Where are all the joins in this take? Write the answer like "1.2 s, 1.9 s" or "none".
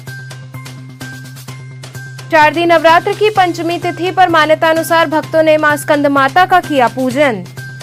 none